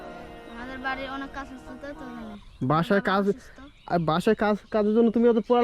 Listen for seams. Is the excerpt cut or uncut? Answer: uncut